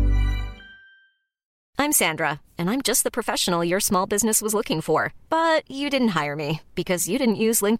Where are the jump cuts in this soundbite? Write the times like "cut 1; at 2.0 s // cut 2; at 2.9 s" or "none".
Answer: cut 1; at 1.5 s